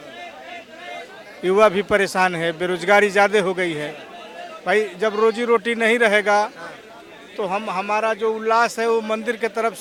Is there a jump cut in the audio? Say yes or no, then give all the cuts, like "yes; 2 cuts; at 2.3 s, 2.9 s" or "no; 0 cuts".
no; 0 cuts